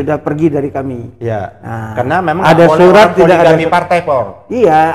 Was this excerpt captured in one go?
yes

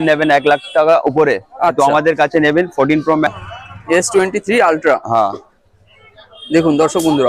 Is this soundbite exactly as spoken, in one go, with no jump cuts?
no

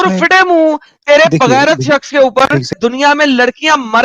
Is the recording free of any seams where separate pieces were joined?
no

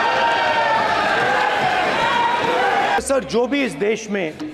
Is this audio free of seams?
yes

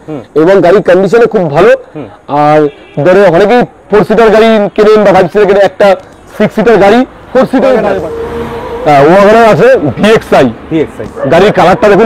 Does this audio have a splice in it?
yes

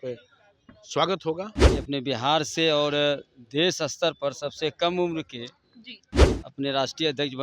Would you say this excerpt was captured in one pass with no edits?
no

